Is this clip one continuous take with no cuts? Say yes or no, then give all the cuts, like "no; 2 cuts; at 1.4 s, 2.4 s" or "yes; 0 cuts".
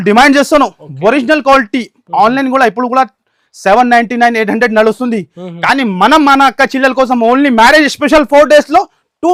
yes; 0 cuts